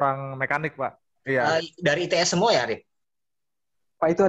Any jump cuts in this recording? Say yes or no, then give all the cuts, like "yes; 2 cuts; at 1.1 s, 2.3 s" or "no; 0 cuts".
yes; 1 cut; at 1.1 s